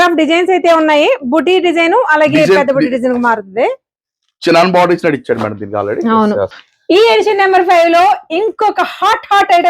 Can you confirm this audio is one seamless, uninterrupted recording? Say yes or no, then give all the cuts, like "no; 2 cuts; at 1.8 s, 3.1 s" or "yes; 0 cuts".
no; 1 cut; at 6.6 s